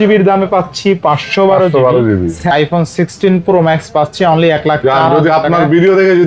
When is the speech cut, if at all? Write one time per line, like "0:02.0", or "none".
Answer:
0:02.4